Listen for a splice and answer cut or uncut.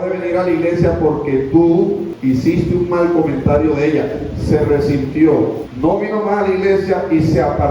cut